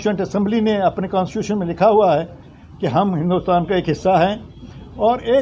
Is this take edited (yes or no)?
no